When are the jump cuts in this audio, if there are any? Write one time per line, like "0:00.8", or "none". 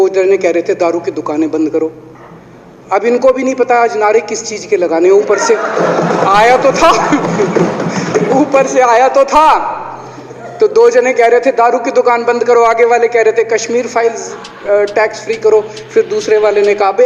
none